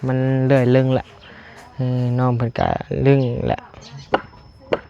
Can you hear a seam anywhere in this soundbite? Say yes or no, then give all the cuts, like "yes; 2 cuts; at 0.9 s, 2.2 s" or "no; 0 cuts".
yes; 1 cut; at 3.9 s